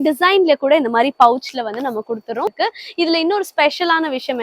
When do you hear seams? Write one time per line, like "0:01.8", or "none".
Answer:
0:02.5